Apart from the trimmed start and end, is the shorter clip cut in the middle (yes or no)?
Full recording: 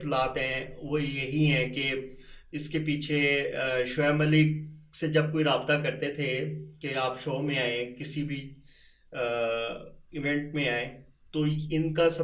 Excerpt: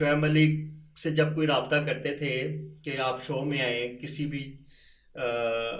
no